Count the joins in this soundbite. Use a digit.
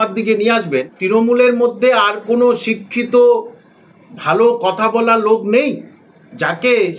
1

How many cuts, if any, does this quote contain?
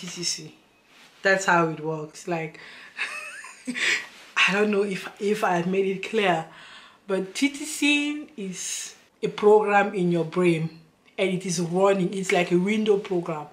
0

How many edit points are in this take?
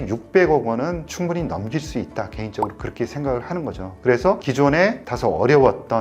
0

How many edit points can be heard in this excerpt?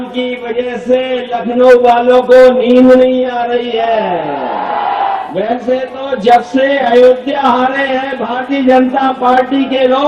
1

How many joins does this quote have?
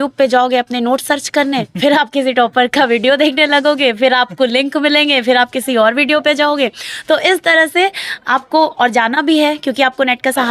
0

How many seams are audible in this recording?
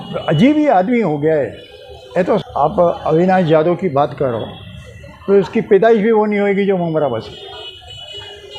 1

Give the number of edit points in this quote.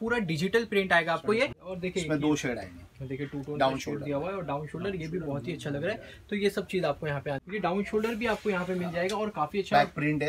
2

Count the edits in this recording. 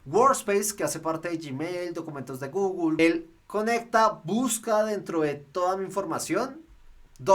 1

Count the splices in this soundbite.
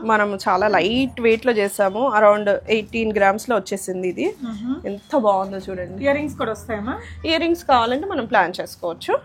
0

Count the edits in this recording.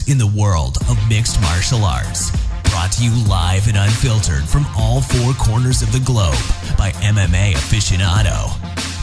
1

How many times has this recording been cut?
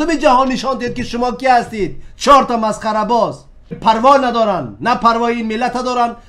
1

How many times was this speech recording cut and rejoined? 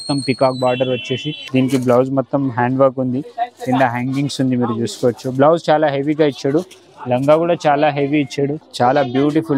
2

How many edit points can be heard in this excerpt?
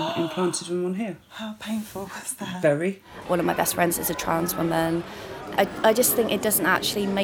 2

